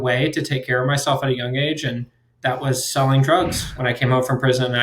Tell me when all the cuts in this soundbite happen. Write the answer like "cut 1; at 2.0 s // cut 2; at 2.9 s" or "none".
cut 1; at 3.7 s